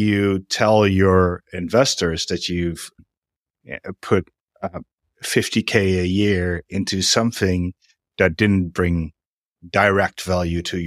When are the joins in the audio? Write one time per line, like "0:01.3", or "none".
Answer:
0:03.0